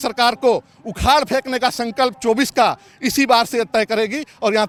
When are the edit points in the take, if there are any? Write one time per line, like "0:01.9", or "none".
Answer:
none